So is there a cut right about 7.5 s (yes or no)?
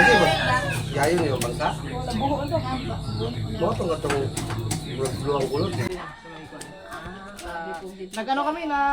no